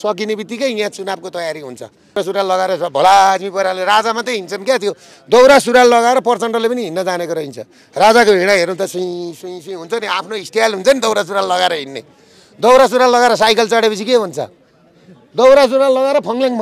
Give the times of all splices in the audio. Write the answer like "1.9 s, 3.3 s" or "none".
2.2 s